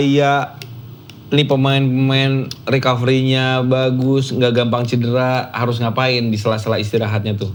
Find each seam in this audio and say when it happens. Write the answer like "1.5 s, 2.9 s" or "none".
none

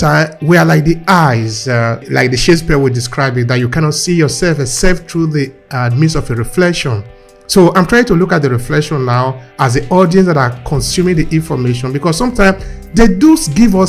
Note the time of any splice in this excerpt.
2.1 s

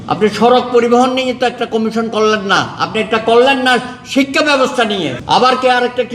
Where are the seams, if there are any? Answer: 5.2 s

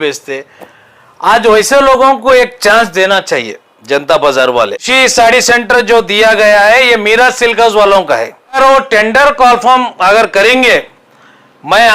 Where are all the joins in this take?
4.9 s, 8.6 s

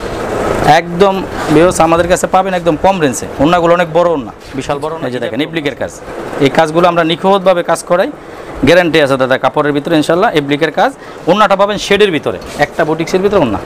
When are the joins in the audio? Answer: 4.9 s

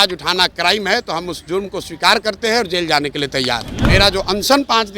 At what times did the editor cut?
3.7 s

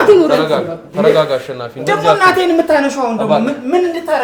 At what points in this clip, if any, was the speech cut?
none

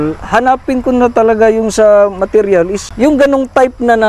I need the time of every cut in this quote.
2.8 s

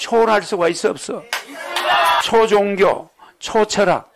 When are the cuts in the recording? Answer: 2.2 s

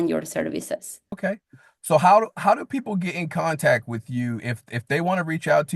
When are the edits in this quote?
1.1 s

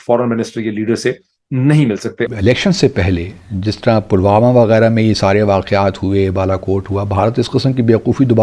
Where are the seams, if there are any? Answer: 2.3 s

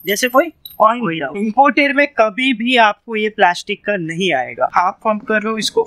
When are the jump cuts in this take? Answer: 1.3 s, 4.7 s

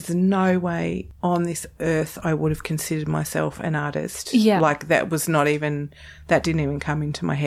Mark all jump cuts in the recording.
1.1 s

